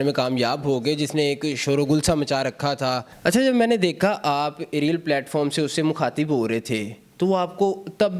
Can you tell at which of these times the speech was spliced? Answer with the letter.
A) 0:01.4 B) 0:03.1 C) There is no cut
B